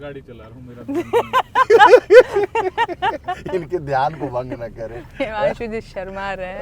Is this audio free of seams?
yes; 0 cuts

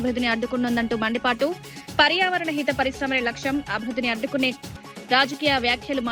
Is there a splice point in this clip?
no; 0 cuts

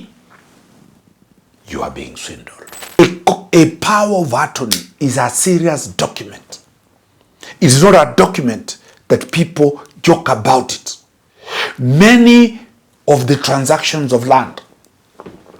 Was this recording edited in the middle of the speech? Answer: yes; 1 cut; at 3.0 s

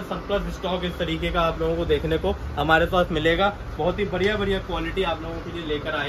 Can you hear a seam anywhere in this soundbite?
no; 0 cuts

